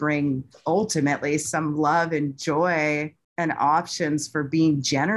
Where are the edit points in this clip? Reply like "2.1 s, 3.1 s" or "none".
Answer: none